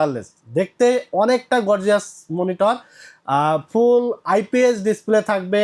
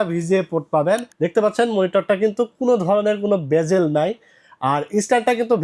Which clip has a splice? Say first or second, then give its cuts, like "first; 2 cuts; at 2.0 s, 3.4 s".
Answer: second; 1 cut; at 1.1 s